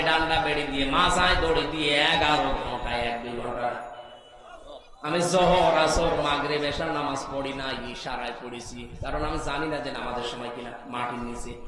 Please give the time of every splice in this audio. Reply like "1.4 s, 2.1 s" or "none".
none